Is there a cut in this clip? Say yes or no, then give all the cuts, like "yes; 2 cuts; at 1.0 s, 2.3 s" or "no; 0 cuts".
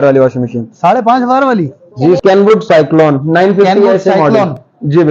yes; 1 cut; at 2.2 s